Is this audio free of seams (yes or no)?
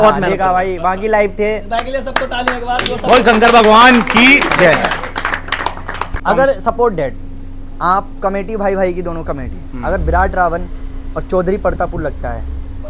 no